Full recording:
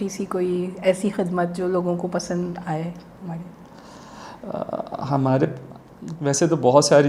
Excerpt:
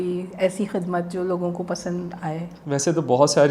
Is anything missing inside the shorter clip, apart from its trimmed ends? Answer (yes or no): yes